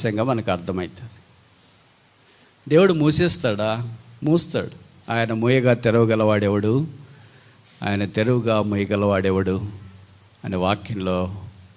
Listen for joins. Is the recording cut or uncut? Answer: uncut